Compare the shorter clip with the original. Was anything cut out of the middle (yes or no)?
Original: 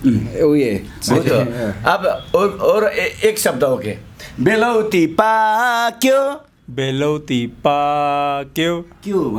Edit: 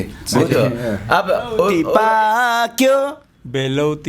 yes